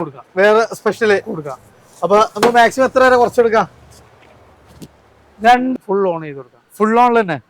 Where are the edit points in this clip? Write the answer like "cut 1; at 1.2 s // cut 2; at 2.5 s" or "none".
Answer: cut 1; at 5.7 s